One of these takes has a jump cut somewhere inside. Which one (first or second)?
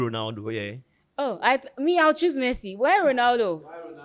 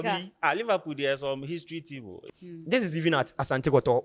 second